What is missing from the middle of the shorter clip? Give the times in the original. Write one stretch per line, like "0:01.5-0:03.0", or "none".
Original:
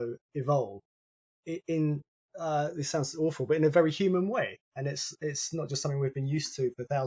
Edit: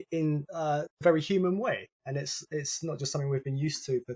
0:02.6-0:03.7

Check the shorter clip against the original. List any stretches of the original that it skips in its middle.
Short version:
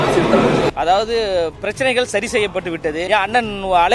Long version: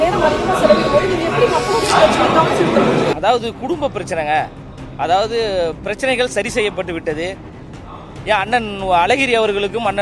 0:03.2-0:05.0
0:07.3-0:08.2

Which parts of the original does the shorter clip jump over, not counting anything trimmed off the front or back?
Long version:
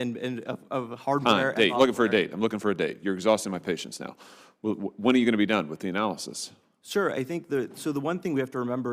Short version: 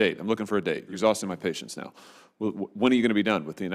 0:03.1-0:03.2

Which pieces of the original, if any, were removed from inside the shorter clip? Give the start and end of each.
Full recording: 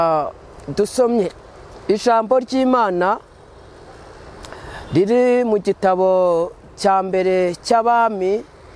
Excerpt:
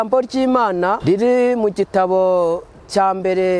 0:03.2-0:04.9

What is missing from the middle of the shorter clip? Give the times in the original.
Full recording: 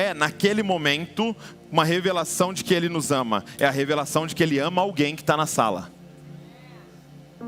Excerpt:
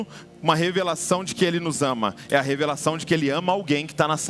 none

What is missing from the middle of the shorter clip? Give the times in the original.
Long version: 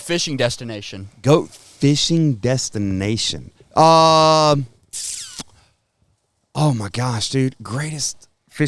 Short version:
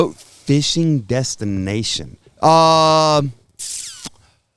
none

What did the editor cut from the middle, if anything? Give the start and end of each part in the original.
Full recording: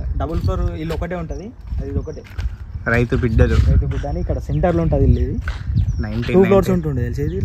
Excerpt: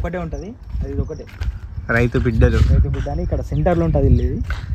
none

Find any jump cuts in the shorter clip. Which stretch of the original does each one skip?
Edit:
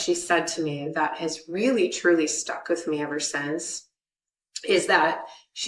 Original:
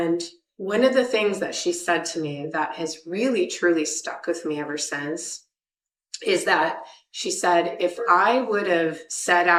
none

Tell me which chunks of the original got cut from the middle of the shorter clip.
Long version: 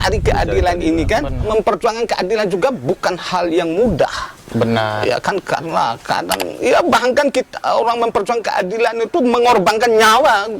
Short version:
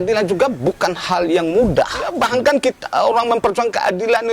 0:04.4-0:06.9

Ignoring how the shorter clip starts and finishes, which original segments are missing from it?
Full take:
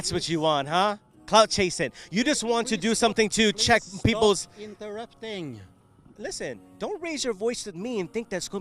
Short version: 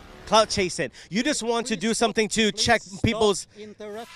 none

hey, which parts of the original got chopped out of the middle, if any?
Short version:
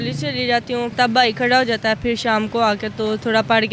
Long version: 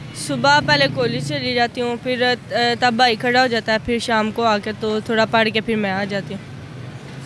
0:02.0-0:02.8

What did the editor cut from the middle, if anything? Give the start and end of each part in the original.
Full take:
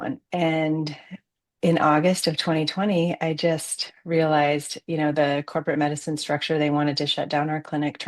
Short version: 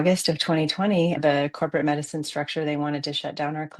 0:03.2-0:05.1

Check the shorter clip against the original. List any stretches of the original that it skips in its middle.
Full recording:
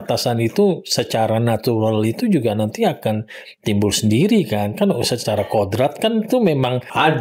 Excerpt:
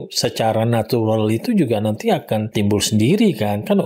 0:03.2-0:03.6

